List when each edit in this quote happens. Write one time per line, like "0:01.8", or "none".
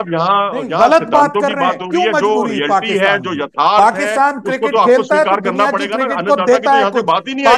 none